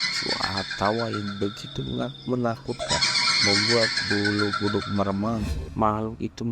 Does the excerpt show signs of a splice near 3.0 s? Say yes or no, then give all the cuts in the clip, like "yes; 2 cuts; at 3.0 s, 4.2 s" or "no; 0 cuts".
no; 1 cut; at 5.6 s